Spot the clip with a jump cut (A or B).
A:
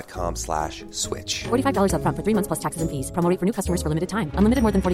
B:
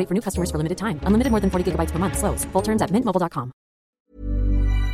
B